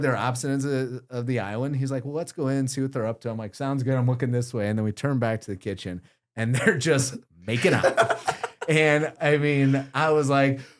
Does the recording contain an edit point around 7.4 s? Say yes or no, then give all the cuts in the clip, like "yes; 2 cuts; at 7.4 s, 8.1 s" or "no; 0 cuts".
no; 1 cut; at 9.2 s